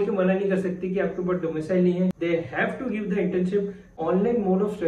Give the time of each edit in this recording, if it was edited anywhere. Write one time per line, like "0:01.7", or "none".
0:02.1
0:03.9